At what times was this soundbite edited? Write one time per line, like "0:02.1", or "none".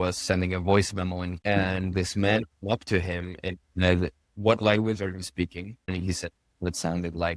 0:01.3
0:05.7